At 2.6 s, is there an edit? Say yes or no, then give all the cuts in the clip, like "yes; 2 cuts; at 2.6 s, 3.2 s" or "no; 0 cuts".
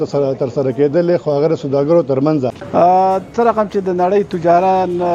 yes; 1 cut; at 2.6 s